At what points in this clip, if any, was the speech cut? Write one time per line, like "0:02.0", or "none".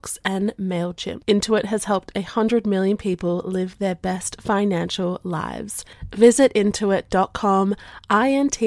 0:01.1